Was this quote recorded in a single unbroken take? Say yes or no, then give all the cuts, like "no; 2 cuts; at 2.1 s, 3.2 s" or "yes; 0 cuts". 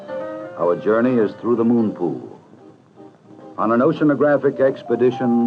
yes; 0 cuts